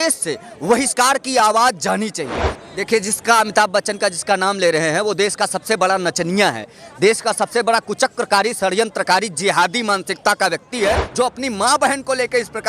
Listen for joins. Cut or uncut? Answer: cut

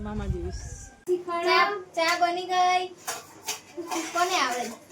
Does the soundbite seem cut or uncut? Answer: cut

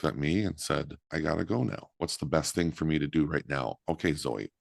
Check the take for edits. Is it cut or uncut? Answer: cut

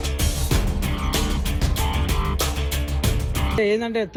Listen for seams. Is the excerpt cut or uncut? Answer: uncut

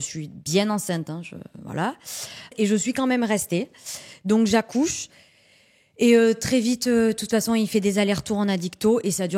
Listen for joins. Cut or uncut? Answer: uncut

